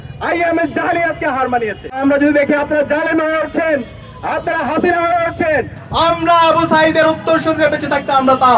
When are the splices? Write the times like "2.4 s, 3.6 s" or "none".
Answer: 2.0 s

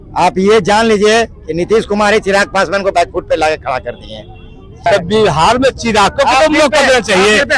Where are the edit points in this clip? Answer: 4.9 s

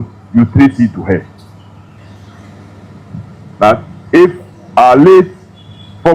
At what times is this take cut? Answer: 2.0 s

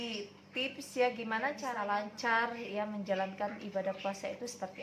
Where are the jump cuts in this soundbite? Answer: 1.7 s

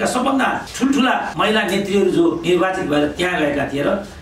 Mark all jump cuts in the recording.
1.0 s, 2.4 s

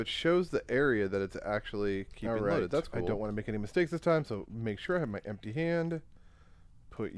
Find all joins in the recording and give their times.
3.1 s

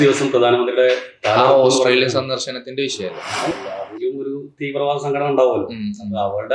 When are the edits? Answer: 3.5 s

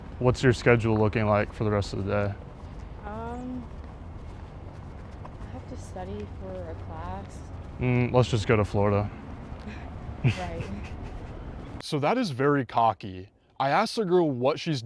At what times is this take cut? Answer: none

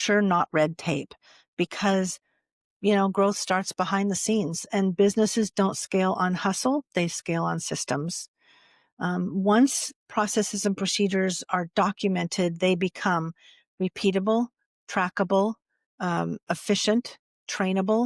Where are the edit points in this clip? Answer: none

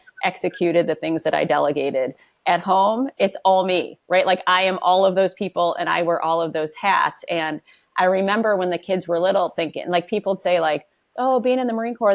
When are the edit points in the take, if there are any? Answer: none

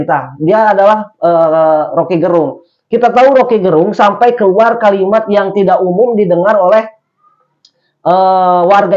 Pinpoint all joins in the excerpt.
none

